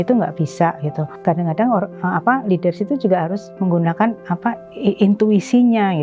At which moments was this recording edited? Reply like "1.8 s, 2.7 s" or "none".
1.1 s